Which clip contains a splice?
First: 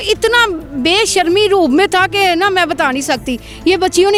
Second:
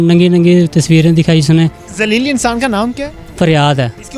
second; 1 cut; at 1.9 s

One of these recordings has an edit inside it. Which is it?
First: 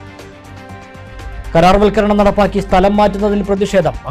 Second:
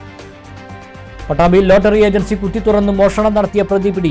first; 1 cut; at 1.1 s

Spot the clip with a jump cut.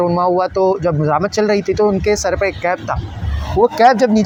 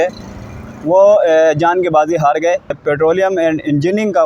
second; 1 cut; at 2.8 s

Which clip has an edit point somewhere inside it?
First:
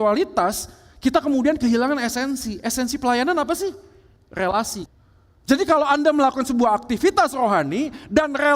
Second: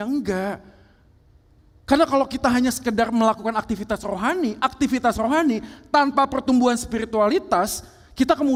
first; 1 cut; at 4.8 s

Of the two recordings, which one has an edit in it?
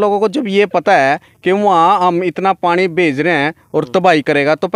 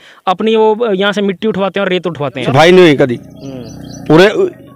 second; 1 cut; at 2.4 s

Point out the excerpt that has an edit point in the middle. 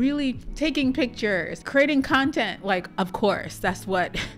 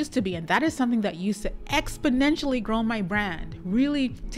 first; 1 cut; at 1.6 s

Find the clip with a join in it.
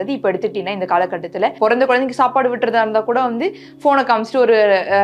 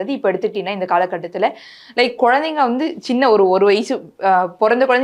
first; 1 cut; at 1.5 s

